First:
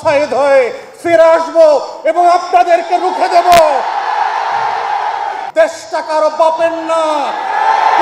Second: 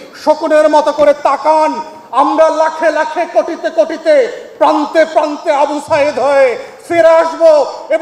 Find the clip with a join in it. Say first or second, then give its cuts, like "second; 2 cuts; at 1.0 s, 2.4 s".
first; 1 cut; at 5.4 s